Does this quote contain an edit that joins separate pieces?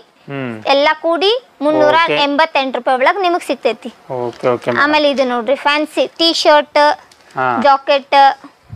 no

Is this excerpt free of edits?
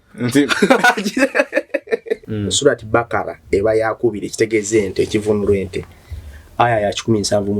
no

